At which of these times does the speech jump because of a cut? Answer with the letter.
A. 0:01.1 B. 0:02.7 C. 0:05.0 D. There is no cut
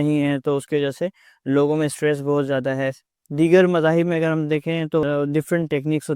C